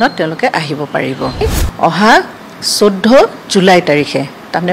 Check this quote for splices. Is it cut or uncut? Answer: cut